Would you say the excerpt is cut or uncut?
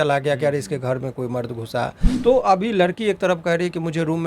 cut